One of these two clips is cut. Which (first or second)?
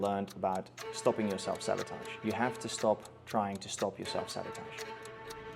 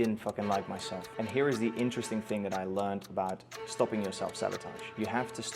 second